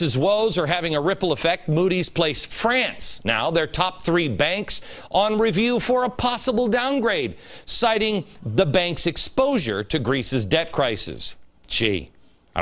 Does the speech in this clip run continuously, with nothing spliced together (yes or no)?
yes